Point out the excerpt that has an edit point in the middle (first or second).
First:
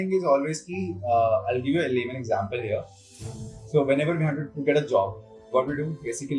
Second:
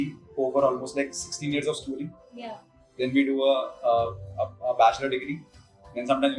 first